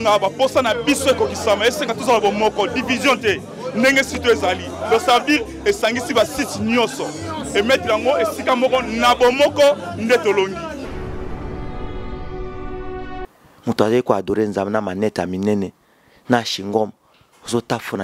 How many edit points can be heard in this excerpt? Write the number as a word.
zero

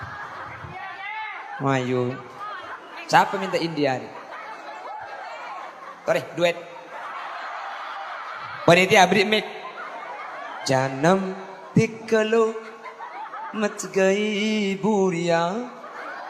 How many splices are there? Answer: zero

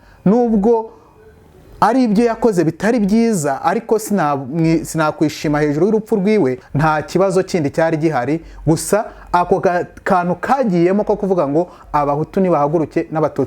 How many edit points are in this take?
one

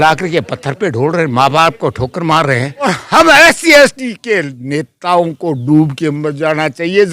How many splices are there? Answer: one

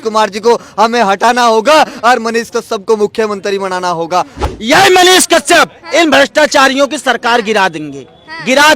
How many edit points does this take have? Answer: one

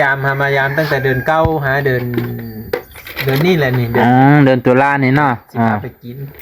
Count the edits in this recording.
zero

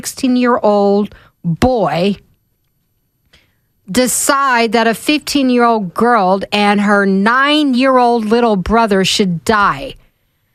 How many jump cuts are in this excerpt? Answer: zero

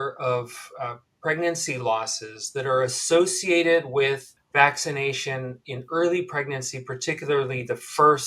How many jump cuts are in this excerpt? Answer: one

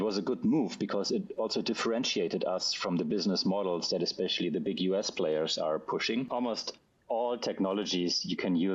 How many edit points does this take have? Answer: one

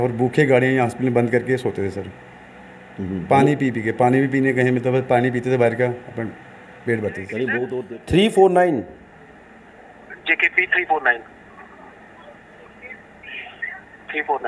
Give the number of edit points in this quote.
one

